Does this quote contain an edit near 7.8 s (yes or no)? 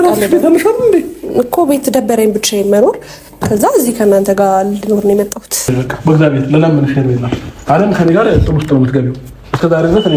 no